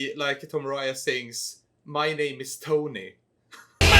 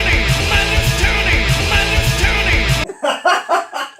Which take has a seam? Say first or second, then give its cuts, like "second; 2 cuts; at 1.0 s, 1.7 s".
second; 1 cut; at 2.8 s